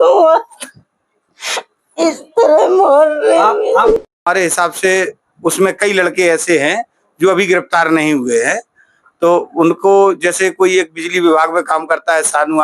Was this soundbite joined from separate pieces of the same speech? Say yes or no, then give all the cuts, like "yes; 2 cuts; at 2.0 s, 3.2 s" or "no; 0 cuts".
yes; 1 cut; at 4.0 s